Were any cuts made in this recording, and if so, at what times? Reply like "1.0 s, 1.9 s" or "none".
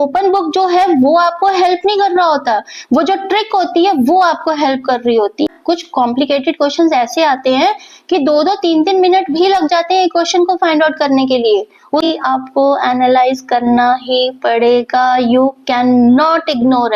5.6 s, 12.0 s